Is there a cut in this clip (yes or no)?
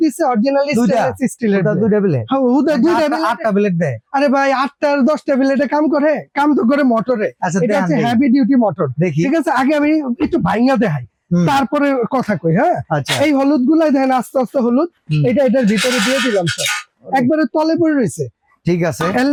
no